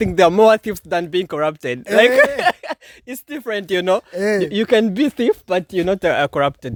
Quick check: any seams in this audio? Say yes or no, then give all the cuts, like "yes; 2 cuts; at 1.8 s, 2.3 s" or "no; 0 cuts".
no; 0 cuts